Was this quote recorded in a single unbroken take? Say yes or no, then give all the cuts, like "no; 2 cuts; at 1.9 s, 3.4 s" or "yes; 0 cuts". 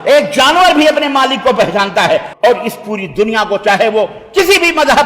no; 1 cut; at 2.3 s